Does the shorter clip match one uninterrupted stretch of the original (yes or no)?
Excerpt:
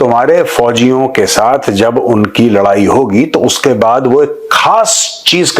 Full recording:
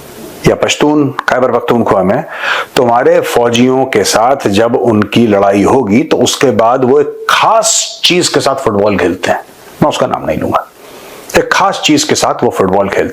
yes